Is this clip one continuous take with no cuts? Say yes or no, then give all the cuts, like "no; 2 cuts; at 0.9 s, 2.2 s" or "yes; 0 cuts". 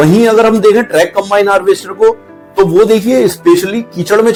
yes; 0 cuts